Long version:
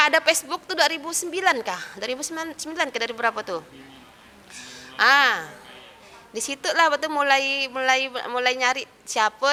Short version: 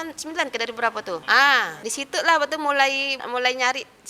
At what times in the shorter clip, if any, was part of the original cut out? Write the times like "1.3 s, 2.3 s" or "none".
1.2 s, 1.8 s, 3.2 s